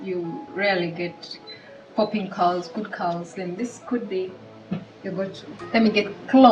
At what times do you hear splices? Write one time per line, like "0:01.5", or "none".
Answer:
0:05.5